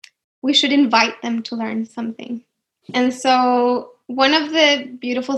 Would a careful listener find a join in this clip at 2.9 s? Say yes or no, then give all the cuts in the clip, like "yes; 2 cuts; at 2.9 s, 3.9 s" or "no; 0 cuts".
yes; 1 cut; at 2.9 s